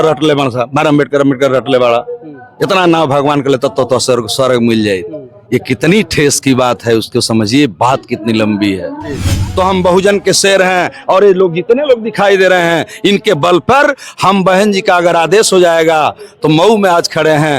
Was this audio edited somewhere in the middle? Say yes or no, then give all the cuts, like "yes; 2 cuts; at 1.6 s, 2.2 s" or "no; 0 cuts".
yes; 1 cut; at 9.4 s